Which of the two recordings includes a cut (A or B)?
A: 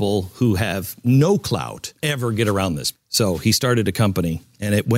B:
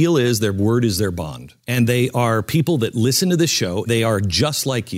B